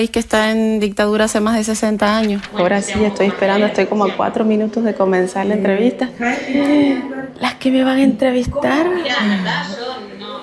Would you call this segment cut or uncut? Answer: cut